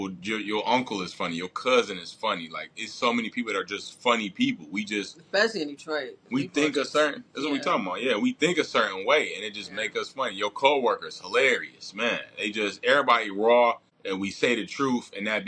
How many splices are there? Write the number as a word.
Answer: one